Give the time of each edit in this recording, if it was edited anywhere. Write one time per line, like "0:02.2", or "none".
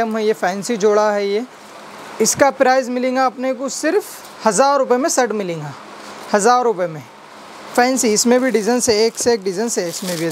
none